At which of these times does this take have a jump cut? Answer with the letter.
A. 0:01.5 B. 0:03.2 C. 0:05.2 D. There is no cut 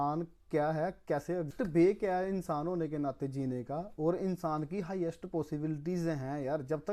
A